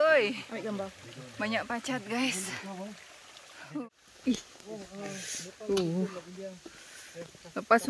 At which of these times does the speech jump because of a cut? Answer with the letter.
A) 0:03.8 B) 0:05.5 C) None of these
A